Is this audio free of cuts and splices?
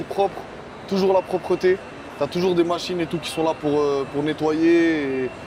yes; 0 cuts

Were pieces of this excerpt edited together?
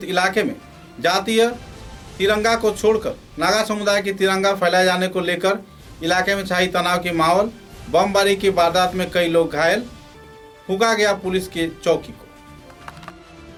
no; 0 cuts

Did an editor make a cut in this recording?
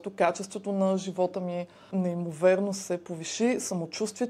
yes; 1 cut; at 1.9 s

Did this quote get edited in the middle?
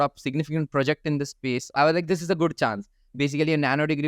yes; 2 cuts; at 1.7 s, 3.0 s

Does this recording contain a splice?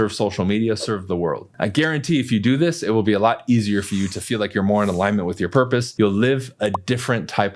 yes; 1 cut; at 5.9 s

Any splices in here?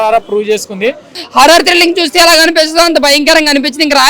yes; 1 cut; at 1.1 s

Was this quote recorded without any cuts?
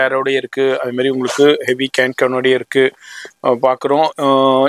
yes; 0 cuts

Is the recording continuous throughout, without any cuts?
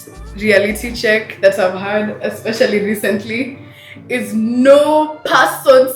yes; 0 cuts

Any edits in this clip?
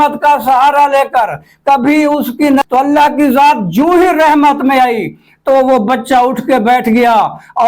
yes; 1 cut; at 2.6 s

